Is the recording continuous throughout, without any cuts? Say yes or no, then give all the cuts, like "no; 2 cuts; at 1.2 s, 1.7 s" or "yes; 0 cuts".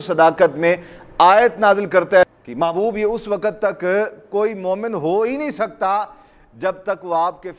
yes; 0 cuts